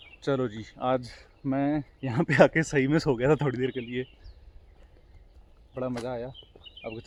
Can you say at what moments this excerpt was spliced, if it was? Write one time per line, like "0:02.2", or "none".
none